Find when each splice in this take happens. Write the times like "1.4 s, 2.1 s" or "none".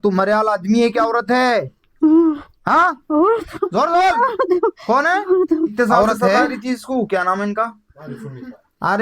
6.6 s